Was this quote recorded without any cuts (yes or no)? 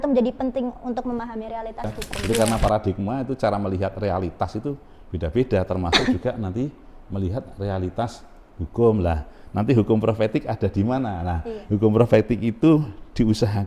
no